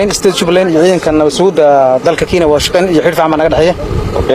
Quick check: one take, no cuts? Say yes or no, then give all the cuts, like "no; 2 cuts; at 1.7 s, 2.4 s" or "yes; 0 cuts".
yes; 0 cuts